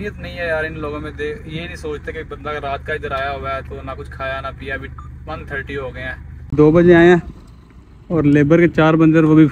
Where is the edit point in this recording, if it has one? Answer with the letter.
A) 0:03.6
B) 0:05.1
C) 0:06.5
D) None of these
C